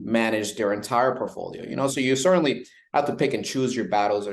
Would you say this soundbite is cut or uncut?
uncut